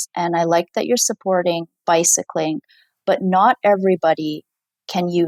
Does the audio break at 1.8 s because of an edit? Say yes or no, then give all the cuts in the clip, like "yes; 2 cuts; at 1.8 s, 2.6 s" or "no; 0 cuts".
no; 0 cuts